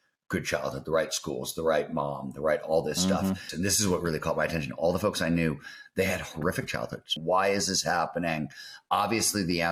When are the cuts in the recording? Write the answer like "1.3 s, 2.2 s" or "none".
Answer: 3.5 s, 7.1 s